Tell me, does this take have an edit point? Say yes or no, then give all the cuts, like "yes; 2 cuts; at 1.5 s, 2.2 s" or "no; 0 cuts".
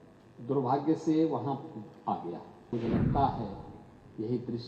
yes; 1 cut; at 2.7 s